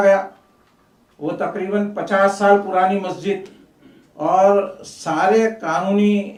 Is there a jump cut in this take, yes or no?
no